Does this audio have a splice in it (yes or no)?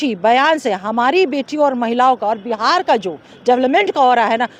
no